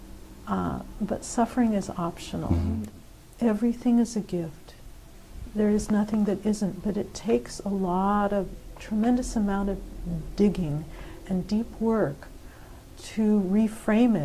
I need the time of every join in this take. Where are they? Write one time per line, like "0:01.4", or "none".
0:02.8